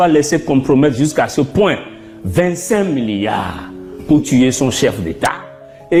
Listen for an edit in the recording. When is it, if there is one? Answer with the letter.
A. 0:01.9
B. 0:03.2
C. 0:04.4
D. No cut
D